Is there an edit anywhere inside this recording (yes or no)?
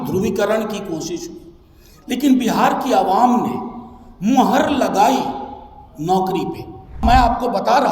yes